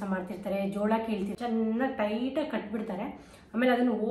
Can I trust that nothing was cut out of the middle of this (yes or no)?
no